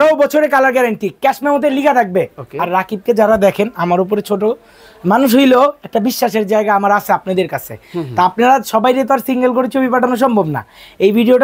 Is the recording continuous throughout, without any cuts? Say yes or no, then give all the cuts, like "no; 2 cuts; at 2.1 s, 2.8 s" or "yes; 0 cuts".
yes; 0 cuts